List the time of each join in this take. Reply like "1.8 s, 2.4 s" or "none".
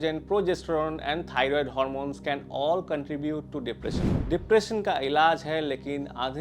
3.9 s